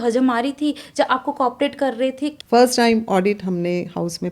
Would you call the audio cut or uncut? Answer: cut